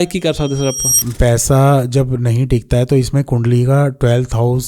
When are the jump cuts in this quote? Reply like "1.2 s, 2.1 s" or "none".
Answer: 1.0 s